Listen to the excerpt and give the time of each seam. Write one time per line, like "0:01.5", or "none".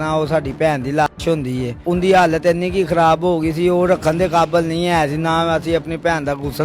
0:01.8

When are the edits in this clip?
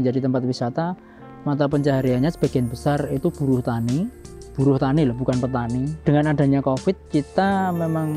0:05.9

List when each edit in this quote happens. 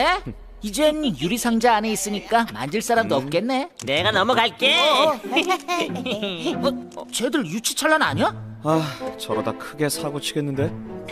0:04.6

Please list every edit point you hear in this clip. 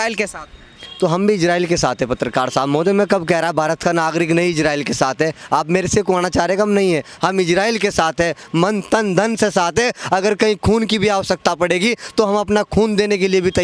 none

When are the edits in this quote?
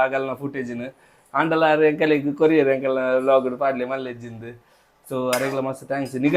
none

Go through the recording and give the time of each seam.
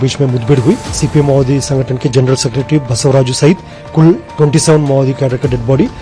0:00.9

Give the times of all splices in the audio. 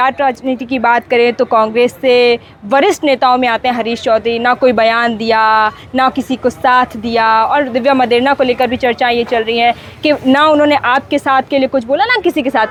none

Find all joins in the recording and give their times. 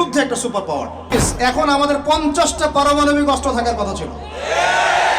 0:01.1

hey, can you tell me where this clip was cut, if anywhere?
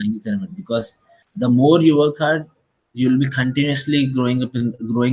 none

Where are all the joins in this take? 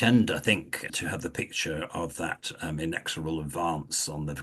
0:00.9

